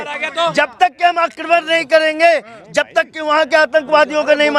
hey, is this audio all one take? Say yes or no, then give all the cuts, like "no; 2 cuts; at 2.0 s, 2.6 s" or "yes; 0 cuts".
yes; 0 cuts